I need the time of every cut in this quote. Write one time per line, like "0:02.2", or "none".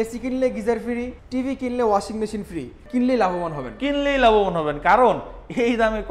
0:01.2
0:02.8